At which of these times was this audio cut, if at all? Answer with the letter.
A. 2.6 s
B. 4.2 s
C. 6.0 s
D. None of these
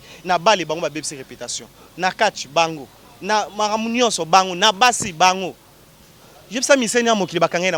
D